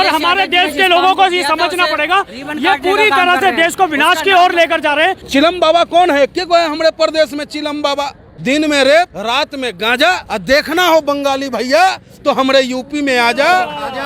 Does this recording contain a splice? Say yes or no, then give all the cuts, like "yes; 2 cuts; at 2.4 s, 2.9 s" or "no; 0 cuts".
yes; 4 cuts; at 5.2 s, 8.2 s, 9.2 s, 10.2 s